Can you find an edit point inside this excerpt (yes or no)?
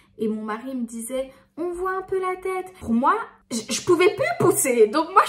yes